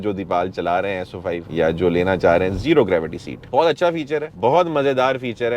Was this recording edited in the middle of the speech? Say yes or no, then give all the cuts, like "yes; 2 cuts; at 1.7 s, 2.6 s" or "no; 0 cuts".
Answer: no; 0 cuts